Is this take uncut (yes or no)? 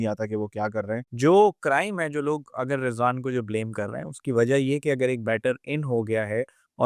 no